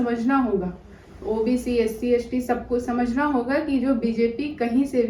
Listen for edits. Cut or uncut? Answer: uncut